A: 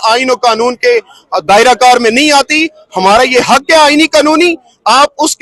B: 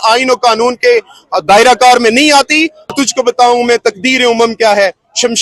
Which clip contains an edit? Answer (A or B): B